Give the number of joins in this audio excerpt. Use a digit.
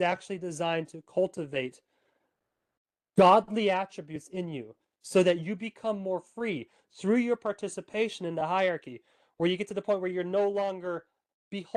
0